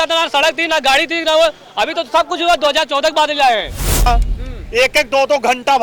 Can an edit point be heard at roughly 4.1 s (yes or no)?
yes